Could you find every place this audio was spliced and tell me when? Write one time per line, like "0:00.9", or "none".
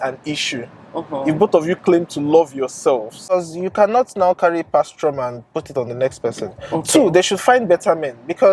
0:03.2